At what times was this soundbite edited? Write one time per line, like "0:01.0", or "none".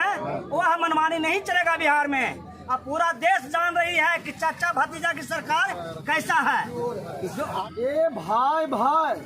0:07.6